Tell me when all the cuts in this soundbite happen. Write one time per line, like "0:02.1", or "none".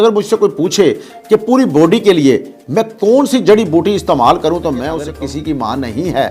0:05.0

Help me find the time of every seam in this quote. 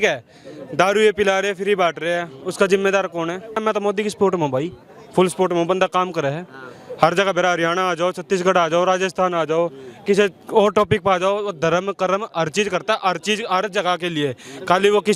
0:03.6

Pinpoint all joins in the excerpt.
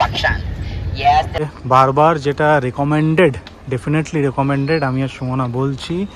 0:01.5

